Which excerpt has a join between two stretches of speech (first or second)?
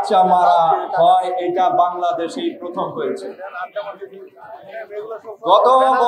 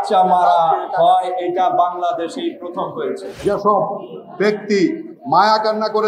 second